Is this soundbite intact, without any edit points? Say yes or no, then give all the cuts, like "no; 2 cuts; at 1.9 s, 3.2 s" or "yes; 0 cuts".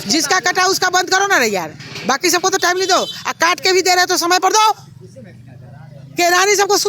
yes; 0 cuts